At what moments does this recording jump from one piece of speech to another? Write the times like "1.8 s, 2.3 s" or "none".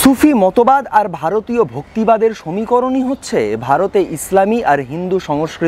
none

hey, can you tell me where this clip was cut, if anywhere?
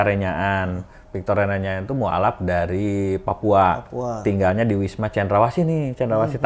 none

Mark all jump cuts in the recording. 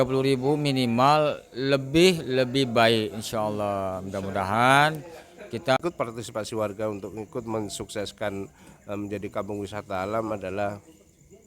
5.6 s

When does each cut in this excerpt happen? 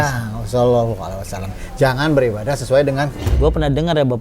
3.3 s

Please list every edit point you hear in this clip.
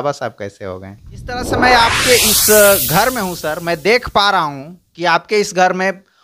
1.5 s

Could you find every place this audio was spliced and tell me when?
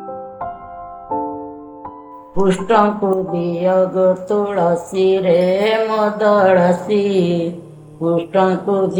2.1 s

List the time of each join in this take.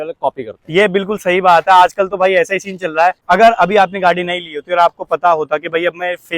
3.2 s

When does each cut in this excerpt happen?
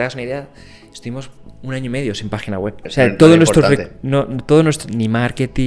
2.8 s

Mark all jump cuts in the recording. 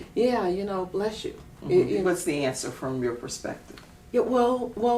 2.0 s

